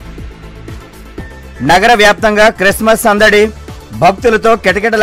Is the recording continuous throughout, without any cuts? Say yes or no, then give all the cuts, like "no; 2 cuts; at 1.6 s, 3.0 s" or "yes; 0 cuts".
yes; 0 cuts